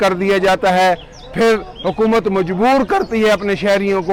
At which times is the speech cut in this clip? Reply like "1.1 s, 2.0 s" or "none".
none